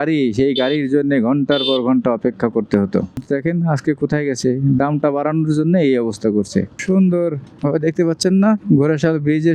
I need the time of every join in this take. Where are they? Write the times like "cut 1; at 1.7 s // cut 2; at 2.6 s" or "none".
cut 1; at 6.8 s